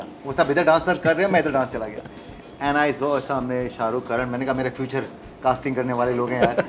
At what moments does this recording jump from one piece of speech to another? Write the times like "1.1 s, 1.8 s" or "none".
none